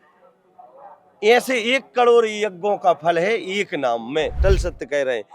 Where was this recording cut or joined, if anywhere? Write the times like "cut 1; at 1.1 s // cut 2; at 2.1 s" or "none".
cut 1; at 4.4 s

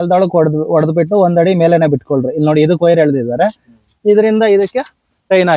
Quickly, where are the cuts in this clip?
none

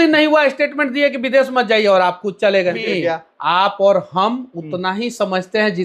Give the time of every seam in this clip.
cut 1; at 2.8 s

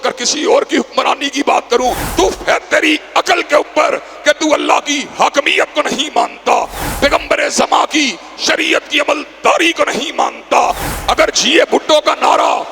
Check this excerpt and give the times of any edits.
cut 1; at 2.0 s // cut 2; at 6.8 s // cut 3; at 10.9 s

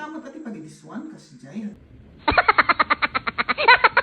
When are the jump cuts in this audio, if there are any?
cut 1; at 1.9 s

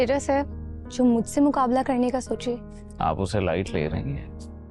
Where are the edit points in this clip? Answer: none

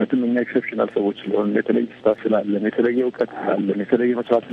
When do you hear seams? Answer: cut 1; at 2.0 s

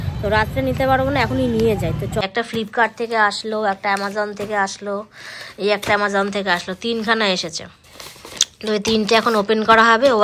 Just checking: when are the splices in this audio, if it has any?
cut 1; at 2.2 s

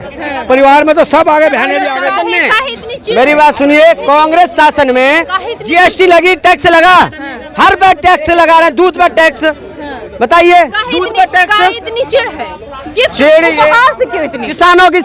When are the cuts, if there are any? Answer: cut 1; at 1.9 s

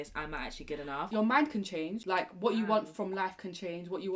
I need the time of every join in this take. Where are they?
cut 1; at 1.1 s

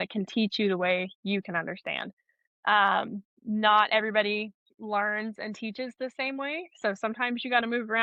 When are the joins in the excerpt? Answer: none

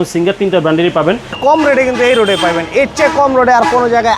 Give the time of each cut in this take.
cut 1; at 1.3 s

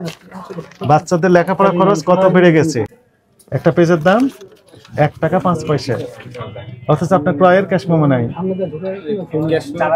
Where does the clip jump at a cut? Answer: none

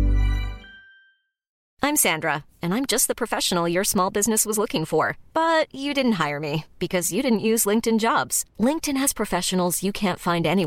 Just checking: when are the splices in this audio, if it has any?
cut 1; at 1.6 s

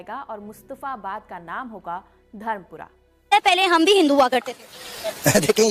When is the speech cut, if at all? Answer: none

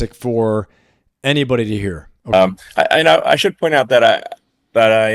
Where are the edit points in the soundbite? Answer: cut 1; at 2.1 s

